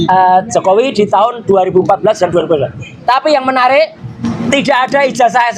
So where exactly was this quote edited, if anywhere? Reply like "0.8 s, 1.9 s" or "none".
4.2 s